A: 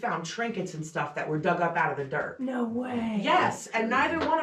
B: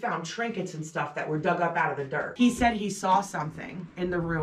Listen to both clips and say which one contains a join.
B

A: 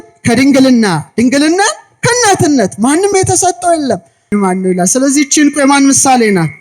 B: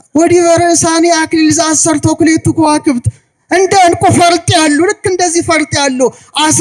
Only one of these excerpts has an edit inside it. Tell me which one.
A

